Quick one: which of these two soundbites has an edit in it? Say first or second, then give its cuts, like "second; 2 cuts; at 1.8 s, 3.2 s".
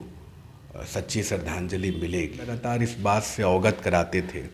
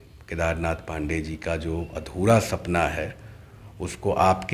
first; 1 cut; at 2.6 s